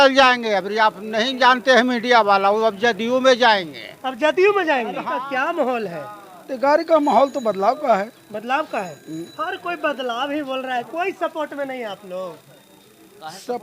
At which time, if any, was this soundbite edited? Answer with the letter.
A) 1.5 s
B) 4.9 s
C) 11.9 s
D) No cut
B